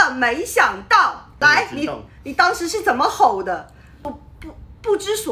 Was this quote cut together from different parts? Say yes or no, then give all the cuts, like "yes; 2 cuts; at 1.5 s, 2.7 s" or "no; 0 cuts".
yes; 2 cuts; at 1.2 s, 4.0 s